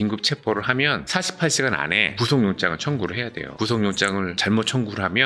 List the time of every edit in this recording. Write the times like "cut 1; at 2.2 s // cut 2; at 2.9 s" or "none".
cut 1; at 3.5 s